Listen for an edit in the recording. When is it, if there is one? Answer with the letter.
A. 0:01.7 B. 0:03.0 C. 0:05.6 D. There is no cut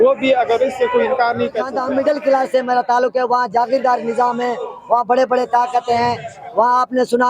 A